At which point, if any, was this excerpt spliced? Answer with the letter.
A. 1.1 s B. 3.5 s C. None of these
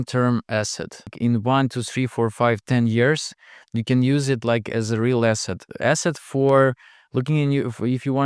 A